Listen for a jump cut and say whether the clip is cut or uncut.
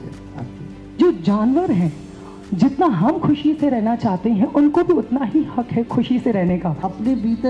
cut